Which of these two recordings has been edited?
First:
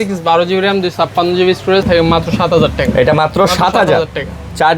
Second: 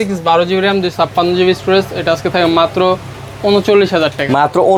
first; 1 cut; at 1.9 s

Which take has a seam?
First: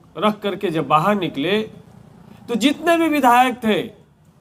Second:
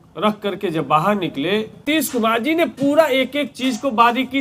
second; 1 cut; at 1.8 s

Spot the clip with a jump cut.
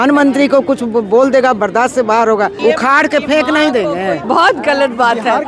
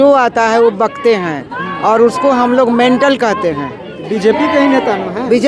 first; 2 cuts; at 2.5 s, 4.2 s

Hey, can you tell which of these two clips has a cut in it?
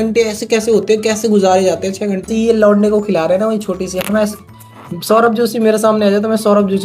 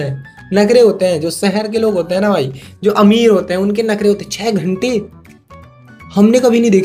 first; 1 cut; at 2.3 s

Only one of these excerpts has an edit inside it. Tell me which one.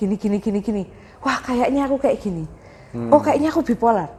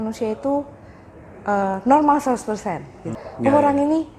second; 1 cut; at 3.2 s

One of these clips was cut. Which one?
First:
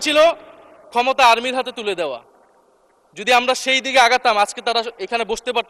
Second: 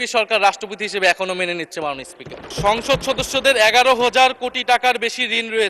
second; 1 cut; at 2.4 s

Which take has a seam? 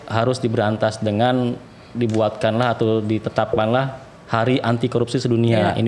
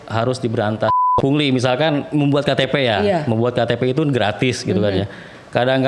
second; 1 cut; at 1.0 s

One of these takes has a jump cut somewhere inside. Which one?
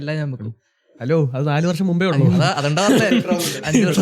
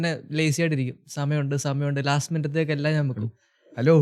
first; 1 cut; at 2.2 s

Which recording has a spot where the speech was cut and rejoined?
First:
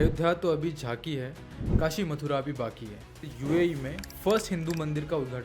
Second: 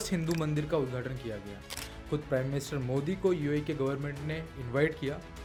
first; 1 cut; at 3.3 s

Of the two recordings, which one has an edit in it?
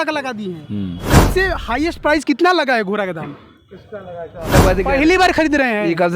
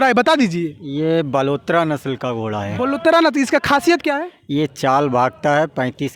first; 2 cuts; at 1.2 s, 4.5 s

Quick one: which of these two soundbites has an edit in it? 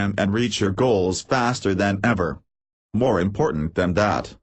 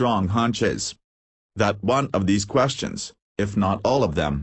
second; 1 cut; at 2.2 s

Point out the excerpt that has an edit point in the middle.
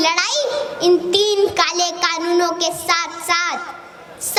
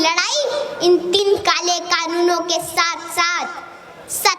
second; 1 cut; at 1.2 s

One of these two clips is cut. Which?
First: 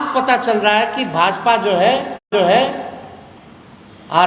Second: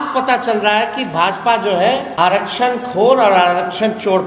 second; 1 cut; at 2.1 s

